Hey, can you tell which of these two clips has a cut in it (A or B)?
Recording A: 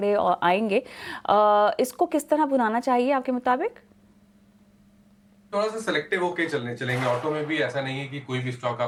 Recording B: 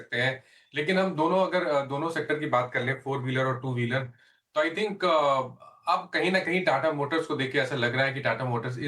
B